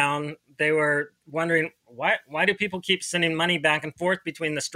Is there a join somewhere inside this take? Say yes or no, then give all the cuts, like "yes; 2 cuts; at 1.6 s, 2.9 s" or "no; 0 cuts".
no; 0 cuts